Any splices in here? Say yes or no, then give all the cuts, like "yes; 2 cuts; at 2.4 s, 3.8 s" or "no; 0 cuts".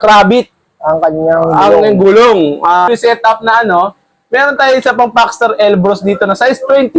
yes; 1 cut; at 2.9 s